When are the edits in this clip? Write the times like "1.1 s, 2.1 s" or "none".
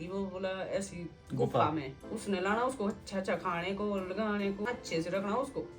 2.0 s, 4.7 s